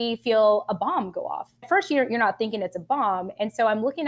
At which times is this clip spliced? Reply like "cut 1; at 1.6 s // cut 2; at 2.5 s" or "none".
none